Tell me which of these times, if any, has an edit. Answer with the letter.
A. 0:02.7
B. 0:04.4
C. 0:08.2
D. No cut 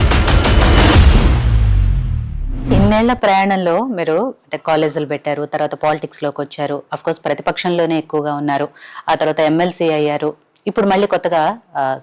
A